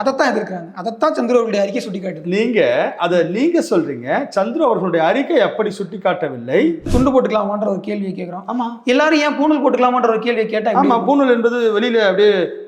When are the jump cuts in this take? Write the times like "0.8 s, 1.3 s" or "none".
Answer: 6.9 s